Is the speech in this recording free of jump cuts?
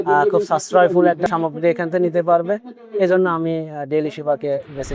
no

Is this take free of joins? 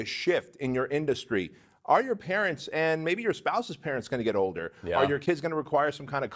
yes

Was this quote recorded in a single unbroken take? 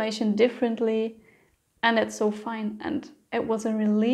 yes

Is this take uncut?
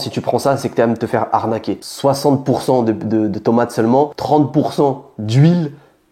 yes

